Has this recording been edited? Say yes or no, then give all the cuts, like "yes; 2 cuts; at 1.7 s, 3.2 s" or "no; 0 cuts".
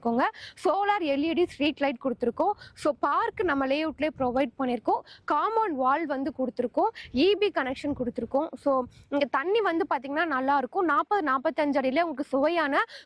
no; 0 cuts